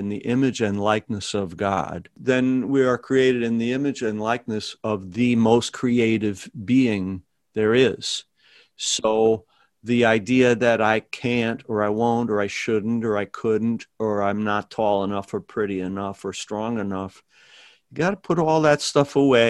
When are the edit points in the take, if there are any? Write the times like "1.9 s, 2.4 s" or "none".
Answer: 2.1 s